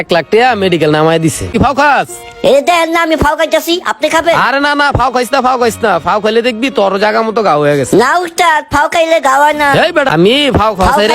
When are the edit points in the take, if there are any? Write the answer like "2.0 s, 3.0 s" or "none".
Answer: 1.5 s, 10.1 s